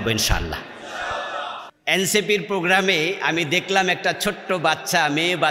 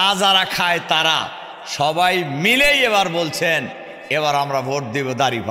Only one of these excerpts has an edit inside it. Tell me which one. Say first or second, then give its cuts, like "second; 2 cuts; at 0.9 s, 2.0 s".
first; 1 cut; at 1.7 s